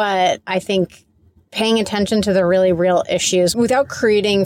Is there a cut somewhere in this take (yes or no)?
yes